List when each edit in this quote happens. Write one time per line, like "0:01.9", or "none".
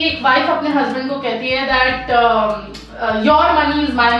none